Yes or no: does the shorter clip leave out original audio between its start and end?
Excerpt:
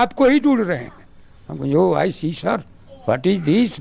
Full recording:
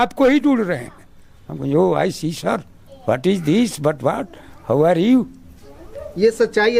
no